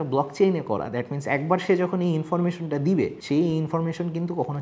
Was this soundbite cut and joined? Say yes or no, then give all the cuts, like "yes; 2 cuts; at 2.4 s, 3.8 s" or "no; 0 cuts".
no; 0 cuts